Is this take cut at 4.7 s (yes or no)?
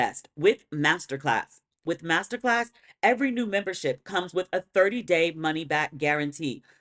no